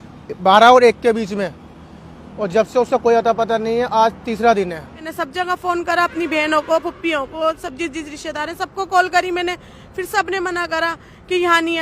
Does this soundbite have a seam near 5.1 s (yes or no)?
yes